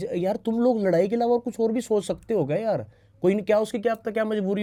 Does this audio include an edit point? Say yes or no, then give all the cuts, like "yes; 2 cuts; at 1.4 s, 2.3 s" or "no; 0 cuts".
no; 0 cuts